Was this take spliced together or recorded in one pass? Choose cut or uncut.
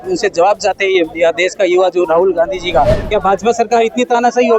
cut